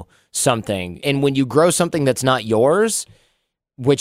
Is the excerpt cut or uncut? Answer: cut